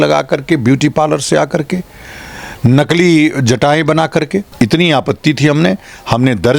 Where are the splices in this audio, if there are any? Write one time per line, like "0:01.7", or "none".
0:04.5

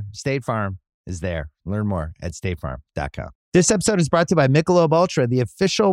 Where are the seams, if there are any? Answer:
0:03.4

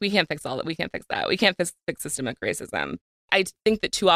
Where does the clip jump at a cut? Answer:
0:03.1

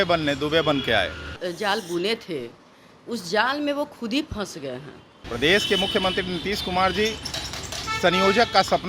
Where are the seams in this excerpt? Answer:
0:01.2
0:05.1

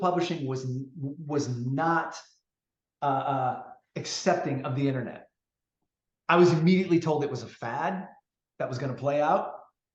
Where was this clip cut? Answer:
none

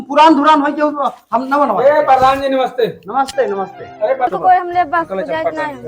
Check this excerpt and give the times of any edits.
0:04.3

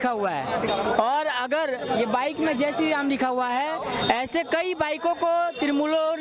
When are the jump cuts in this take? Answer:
none

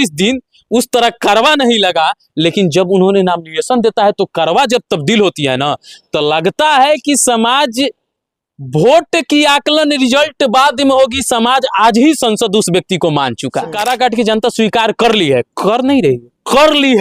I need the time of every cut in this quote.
0:13.8

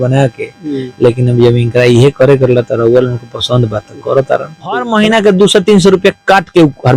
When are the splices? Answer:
0:04.9

